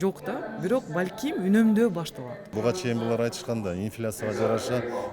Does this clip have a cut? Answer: yes; 1 cut; at 2.5 s

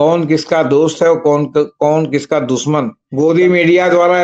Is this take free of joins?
no; 1 cut; at 3.0 s

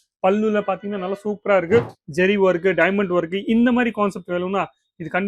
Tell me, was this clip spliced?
yes; 1 cut; at 2.0 s

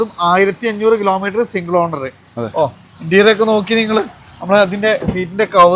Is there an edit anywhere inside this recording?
no; 0 cuts

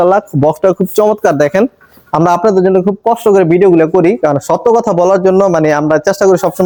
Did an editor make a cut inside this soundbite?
no; 0 cuts

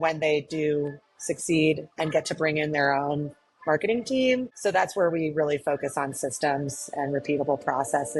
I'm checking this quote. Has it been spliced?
no; 0 cuts

